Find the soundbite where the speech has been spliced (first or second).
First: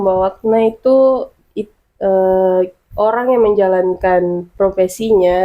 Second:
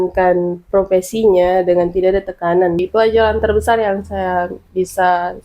second